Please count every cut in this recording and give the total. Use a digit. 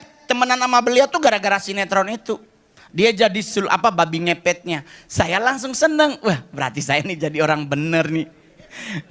1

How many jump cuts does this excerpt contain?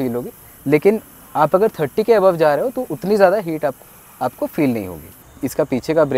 1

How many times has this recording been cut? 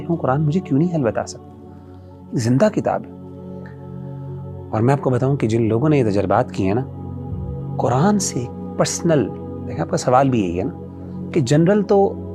0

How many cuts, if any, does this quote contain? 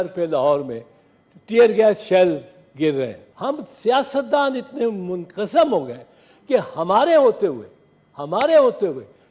1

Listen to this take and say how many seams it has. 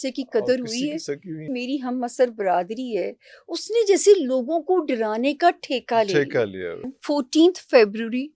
2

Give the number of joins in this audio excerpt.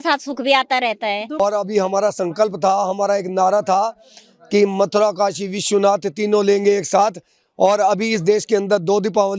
1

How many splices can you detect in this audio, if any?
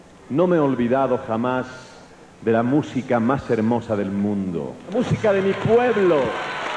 1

